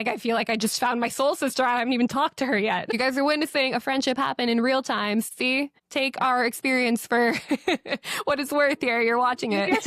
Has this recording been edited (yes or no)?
yes